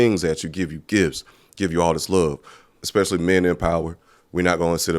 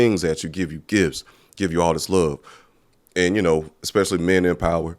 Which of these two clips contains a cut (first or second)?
first